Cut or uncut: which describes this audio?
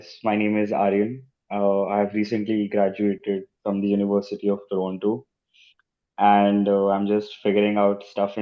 uncut